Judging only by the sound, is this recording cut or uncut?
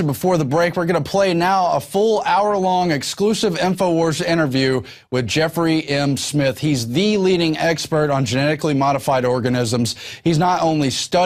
uncut